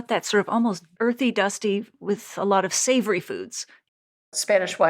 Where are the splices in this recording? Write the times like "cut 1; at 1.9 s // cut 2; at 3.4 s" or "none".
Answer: cut 1; at 0.9 s // cut 2; at 3.7 s